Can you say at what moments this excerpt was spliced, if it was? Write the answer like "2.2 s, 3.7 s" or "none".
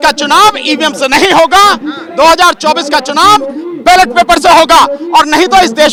none

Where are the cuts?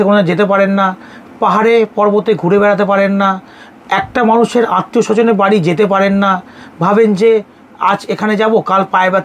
none

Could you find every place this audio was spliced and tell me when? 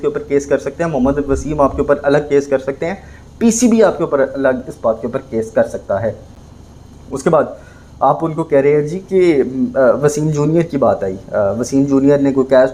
none

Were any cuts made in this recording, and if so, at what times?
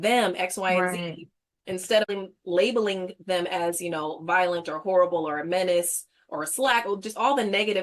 2.1 s

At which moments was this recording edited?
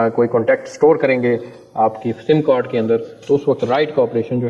none

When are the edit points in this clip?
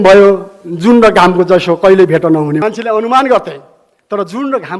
2.6 s

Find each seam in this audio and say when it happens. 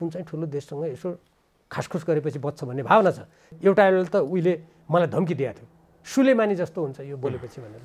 3.5 s

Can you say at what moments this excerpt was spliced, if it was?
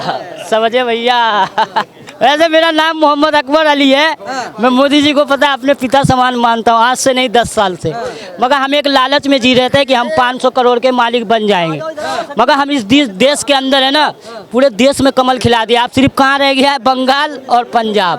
none

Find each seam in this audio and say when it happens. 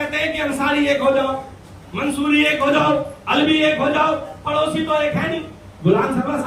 none

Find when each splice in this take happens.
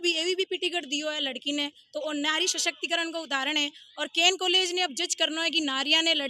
none

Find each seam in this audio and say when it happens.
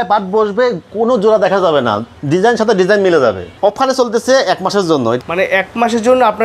3.5 s, 5.2 s

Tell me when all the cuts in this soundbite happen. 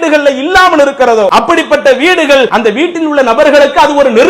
1.3 s, 2.5 s

